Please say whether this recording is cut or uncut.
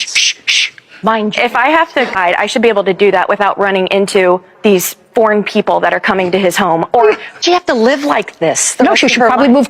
cut